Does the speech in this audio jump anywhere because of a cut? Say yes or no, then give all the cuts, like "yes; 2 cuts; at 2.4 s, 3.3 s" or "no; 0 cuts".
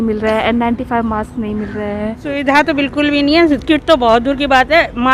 yes; 1 cut; at 2.3 s